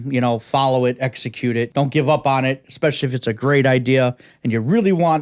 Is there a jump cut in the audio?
yes; 1 cut; at 1.7 s

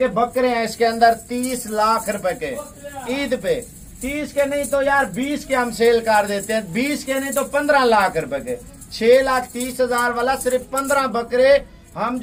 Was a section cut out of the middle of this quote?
no; 0 cuts

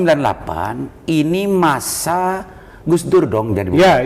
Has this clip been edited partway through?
no; 0 cuts

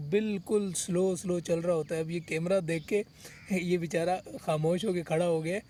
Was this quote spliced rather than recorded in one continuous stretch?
no; 0 cuts

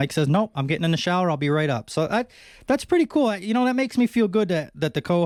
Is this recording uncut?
yes; 0 cuts

